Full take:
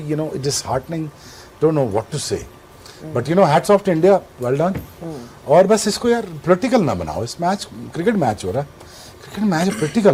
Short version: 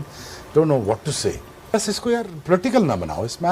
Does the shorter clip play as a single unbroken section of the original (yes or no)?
no